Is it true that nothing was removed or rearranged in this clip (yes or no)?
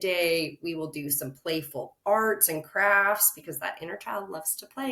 yes